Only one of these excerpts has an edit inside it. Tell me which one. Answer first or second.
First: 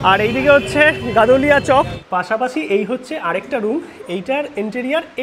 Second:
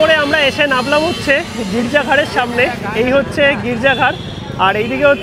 first